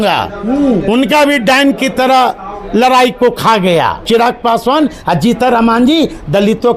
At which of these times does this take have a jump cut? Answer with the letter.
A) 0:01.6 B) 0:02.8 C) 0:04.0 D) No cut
C